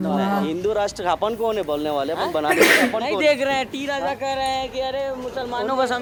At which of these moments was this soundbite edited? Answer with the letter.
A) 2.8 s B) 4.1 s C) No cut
C